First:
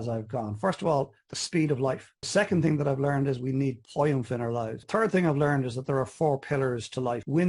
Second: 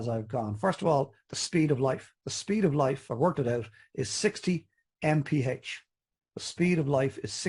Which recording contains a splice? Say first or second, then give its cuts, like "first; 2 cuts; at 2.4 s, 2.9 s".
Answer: first; 2 cuts; at 2.1 s, 4.8 s